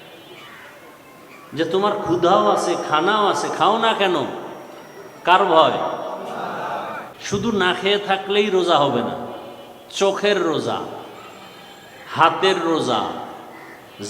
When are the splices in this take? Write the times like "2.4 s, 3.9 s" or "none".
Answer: 7.1 s